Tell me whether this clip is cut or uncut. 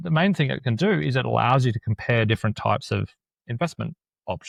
uncut